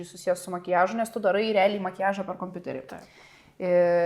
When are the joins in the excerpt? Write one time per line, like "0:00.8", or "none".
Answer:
none